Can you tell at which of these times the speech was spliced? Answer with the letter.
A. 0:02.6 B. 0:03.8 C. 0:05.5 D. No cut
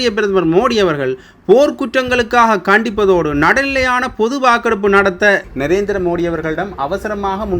C